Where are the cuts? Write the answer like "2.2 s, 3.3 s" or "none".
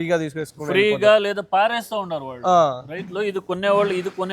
none